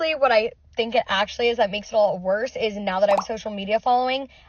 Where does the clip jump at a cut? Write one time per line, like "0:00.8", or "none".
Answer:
none